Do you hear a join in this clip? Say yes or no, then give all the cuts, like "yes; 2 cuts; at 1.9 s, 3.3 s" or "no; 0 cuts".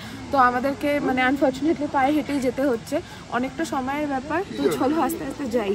no; 0 cuts